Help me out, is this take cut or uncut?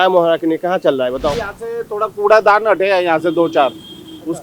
cut